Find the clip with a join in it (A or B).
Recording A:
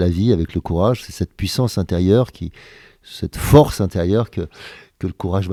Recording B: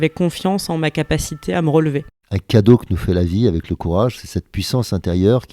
B